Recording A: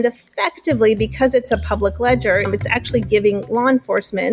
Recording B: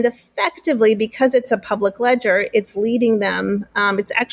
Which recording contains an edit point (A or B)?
A